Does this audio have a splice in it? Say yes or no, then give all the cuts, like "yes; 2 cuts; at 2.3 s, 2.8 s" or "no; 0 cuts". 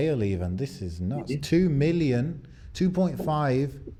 no; 0 cuts